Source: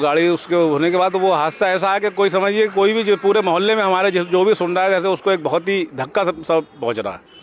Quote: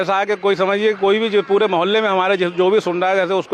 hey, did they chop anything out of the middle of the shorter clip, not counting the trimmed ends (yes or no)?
no